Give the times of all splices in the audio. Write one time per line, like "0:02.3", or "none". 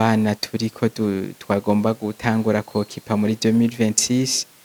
none